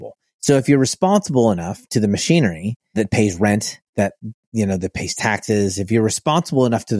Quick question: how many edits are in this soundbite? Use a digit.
1